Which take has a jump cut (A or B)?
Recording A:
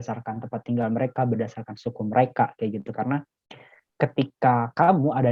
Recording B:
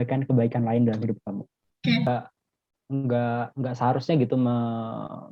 B